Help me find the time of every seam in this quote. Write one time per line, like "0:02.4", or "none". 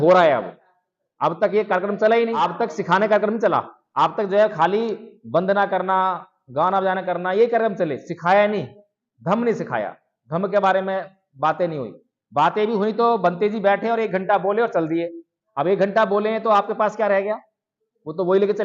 0:02.4
0:03.8